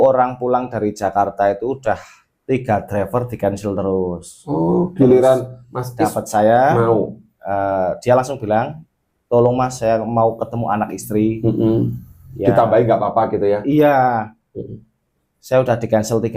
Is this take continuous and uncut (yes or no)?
yes